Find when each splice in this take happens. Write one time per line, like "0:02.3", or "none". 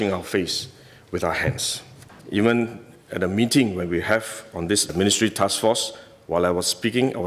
0:02.1